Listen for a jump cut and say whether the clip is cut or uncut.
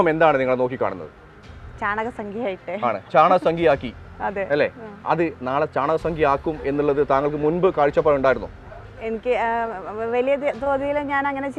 uncut